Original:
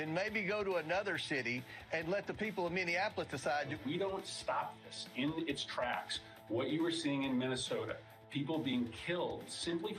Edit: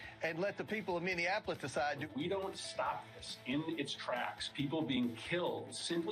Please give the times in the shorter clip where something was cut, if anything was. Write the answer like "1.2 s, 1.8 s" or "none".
4.4 s